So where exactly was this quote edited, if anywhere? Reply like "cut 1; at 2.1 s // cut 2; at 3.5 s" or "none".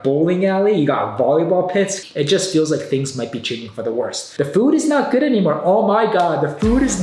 cut 1; at 2.0 s // cut 2; at 4.2 s